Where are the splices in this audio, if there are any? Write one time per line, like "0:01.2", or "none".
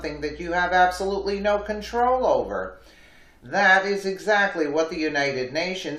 none